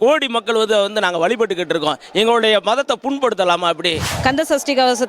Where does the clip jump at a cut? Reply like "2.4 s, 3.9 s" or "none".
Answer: 4.1 s